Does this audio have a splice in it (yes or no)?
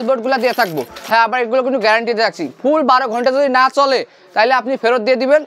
yes